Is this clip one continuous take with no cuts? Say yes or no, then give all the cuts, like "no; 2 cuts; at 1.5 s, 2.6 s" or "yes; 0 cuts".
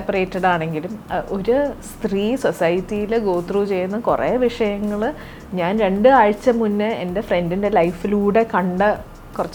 yes; 0 cuts